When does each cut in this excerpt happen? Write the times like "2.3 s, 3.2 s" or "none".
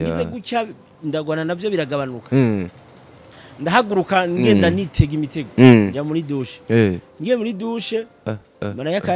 none